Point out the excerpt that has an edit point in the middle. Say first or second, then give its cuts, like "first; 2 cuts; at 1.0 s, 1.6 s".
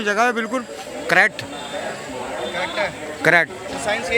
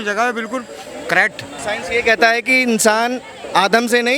second; 1 cut; at 1.5 s